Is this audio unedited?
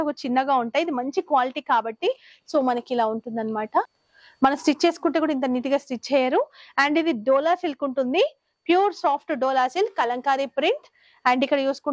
no; 1 cut; at 4.0 s

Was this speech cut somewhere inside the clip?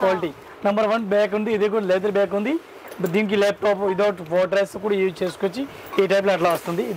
no; 0 cuts

